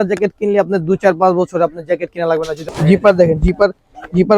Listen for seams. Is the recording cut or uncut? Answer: cut